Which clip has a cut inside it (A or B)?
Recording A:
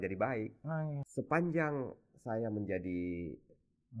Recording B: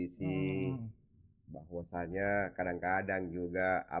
A